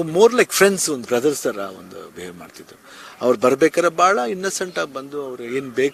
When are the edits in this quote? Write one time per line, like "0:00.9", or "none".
none